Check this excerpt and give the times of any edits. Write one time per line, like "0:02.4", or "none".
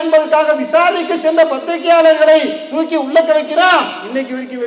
none